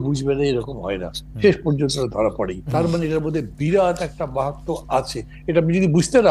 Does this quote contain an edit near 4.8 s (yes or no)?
no